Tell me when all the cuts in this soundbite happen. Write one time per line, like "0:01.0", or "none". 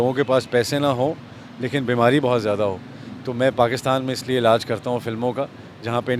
none